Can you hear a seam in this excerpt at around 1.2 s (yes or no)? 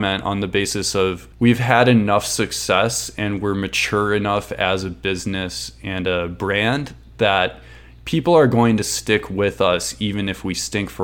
yes